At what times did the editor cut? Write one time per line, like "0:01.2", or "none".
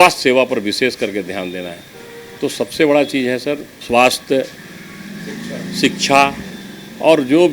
none